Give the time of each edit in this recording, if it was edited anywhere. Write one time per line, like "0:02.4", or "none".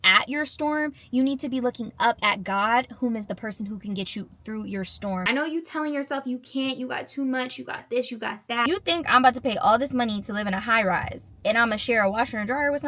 0:05.2
0:08.6